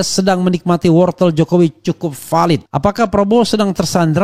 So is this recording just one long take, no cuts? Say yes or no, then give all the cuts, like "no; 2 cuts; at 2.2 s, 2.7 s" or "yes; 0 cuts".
no; 1 cut; at 2.7 s